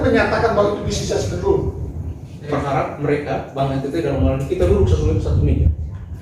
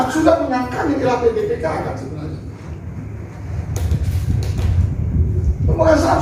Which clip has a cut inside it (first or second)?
first